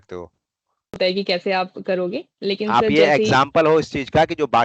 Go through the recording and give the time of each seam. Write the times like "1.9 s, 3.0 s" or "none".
1.0 s